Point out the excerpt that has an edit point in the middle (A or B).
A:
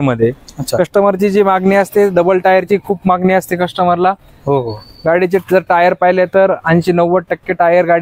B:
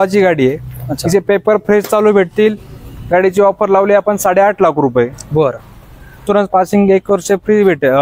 B